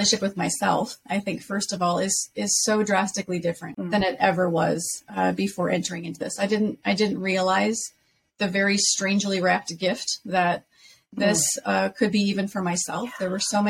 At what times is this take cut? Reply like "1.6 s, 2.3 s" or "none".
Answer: 3.7 s